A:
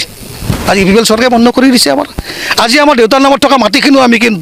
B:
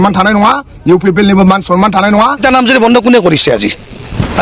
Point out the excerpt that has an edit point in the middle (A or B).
B